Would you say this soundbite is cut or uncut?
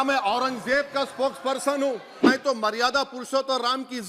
cut